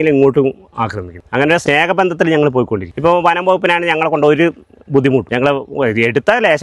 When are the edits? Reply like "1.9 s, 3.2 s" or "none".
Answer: 1.5 s, 2.9 s, 5.3 s